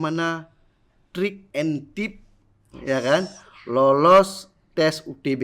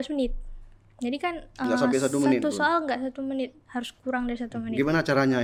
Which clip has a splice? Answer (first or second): first